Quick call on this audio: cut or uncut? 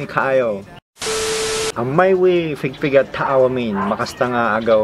cut